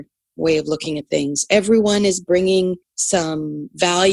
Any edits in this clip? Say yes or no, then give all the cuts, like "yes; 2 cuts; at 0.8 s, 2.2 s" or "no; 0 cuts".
yes; 1 cut; at 2.9 s